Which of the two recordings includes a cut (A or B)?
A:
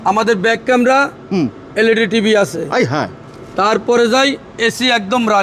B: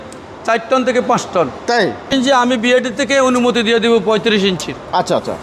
B